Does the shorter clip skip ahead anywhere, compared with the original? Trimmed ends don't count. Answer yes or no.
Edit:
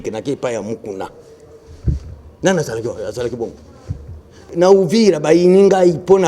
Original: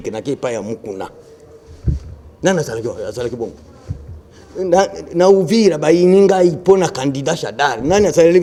yes